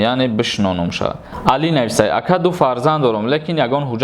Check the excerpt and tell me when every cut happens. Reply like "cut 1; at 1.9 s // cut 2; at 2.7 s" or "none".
cut 1; at 1.3 s